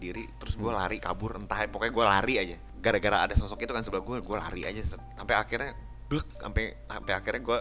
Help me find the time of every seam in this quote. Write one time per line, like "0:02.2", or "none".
0:02.6